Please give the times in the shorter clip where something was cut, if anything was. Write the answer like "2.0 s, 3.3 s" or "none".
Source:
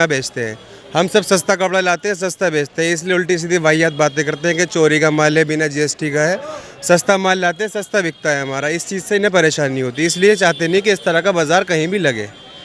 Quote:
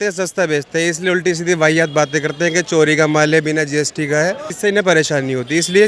4.5 s